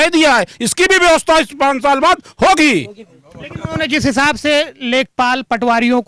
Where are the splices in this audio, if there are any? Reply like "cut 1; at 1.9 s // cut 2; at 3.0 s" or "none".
none